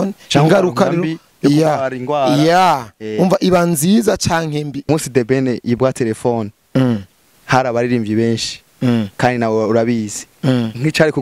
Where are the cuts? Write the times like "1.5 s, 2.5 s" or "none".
4.9 s